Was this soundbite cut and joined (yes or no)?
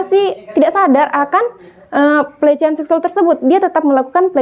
no